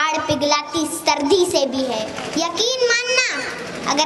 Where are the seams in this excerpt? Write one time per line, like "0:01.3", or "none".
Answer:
0:02.2